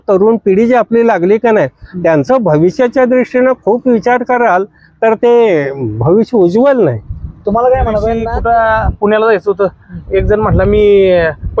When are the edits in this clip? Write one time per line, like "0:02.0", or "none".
0:08.3

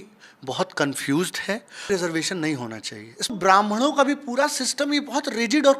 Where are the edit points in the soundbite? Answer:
0:01.8
0:03.3

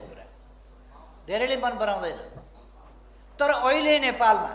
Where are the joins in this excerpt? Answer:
none

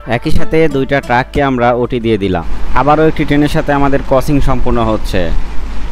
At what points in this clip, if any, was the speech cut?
0:02.6

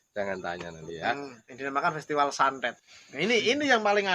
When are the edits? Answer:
0:01.4

